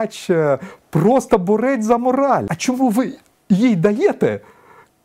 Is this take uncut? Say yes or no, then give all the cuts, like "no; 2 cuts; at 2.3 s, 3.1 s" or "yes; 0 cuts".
no; 1 cut; at 2.5 s